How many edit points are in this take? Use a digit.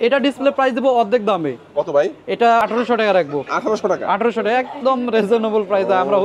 1